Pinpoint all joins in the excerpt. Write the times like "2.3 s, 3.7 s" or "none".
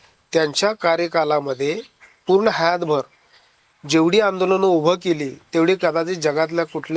none